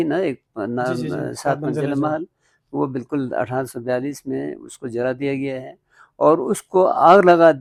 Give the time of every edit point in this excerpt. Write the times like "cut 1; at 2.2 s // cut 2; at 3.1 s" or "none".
none